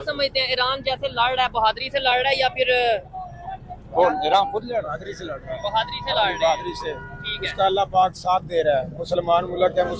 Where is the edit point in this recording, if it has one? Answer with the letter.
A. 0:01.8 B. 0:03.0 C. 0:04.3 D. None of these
D